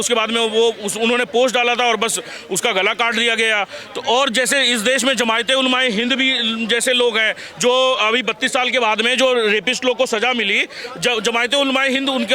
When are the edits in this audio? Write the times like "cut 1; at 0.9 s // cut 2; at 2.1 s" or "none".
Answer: none